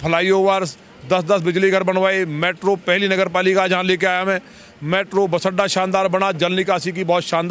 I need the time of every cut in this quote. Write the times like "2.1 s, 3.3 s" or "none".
none